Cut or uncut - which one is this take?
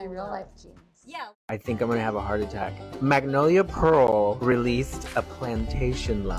cut